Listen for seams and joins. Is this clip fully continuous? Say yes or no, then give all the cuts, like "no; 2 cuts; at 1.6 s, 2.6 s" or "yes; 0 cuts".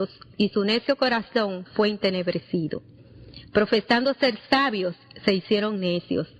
yes; 0 cuts